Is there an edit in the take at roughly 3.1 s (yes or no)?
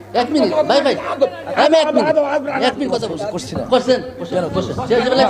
yes